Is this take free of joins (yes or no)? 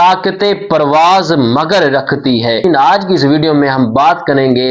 no